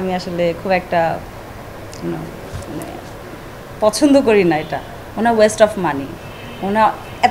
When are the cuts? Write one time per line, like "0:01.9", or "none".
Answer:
none